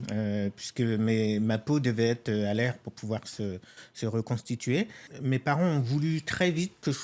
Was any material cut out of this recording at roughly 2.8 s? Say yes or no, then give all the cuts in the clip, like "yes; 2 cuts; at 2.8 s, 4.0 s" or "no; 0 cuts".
no; 1 cut; at 5.1 s